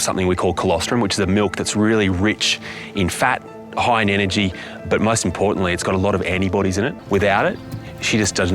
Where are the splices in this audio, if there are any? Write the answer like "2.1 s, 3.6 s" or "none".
7.0 s